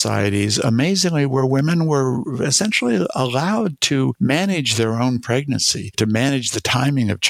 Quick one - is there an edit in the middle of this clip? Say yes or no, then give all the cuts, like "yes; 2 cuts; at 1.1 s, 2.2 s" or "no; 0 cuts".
yes; 1 cut; at 4.1 s